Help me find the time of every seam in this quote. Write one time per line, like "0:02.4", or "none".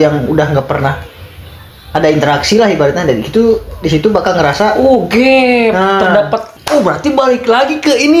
0:06.5